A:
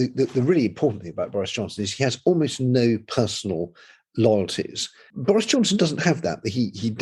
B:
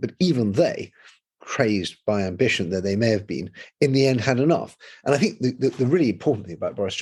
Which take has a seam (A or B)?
A